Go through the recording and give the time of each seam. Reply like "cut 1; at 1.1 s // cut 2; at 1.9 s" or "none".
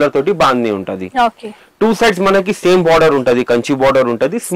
none